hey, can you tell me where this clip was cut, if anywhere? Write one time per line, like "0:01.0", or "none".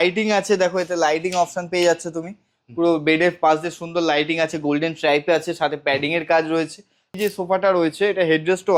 0:07.1